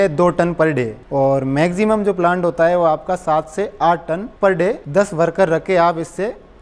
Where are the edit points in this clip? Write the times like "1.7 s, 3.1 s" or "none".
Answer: 1.0 s